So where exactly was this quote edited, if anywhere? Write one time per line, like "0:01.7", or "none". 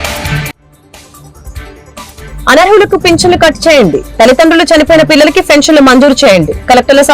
0:02.3